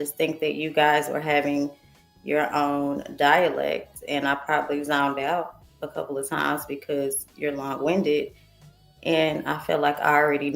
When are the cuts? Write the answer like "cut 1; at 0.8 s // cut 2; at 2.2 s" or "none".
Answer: none